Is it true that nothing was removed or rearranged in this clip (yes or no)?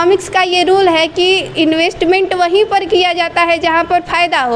yes